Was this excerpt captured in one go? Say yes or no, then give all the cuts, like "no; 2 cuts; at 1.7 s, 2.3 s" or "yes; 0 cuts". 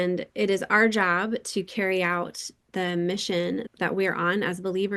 no; 1 cut; at 3.7 s